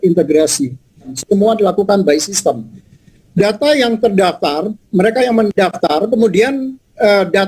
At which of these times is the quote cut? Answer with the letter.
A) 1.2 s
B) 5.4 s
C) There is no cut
A